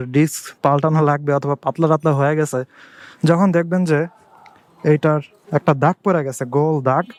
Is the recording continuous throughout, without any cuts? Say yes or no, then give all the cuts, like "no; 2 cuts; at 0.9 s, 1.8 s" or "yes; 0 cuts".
yes; 0 cuts